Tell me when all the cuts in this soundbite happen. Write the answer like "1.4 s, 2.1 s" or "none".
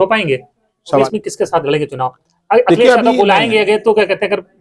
1.0 s